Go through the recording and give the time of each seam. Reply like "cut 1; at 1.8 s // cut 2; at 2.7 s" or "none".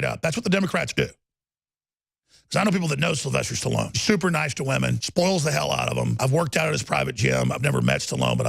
cut 1; at 3.9 s // cut 2; at 5.0 s // cut 3; at 6.1 s